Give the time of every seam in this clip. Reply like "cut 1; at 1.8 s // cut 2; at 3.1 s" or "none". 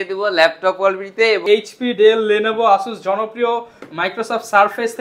cut 1; at 1.4 s